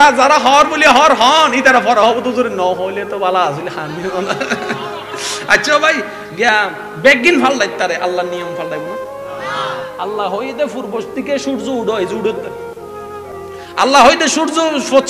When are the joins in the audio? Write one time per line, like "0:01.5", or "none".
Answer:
none